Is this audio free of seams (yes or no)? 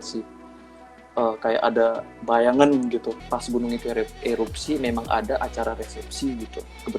no